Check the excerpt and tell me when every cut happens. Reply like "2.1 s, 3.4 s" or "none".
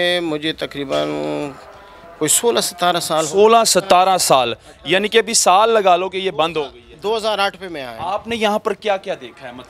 none